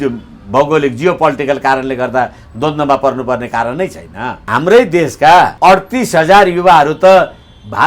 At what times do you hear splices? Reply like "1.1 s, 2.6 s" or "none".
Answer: 4.4 s, 5.5 s